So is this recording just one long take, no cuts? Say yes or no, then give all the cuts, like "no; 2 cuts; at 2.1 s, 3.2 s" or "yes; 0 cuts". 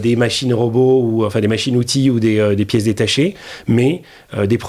yes; 0 cuts